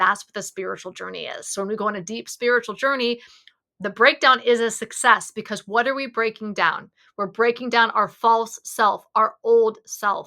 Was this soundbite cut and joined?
no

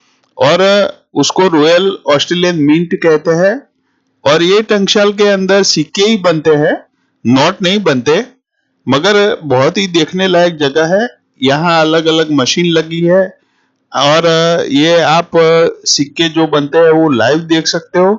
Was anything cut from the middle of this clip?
no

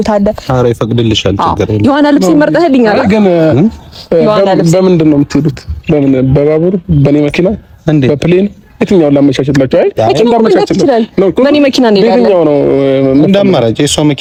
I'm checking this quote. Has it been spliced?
no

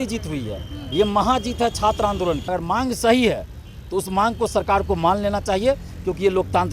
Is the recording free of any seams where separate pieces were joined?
no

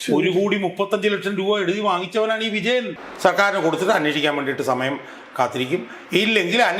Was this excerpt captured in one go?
no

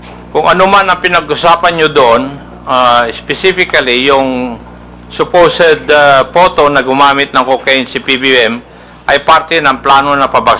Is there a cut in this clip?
no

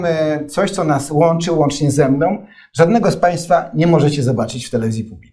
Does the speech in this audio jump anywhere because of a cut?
no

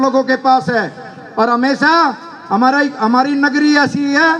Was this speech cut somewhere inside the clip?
no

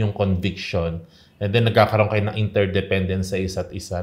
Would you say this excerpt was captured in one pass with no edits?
yes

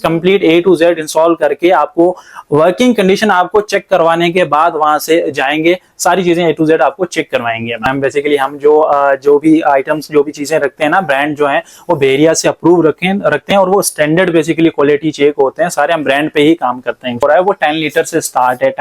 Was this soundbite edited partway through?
yes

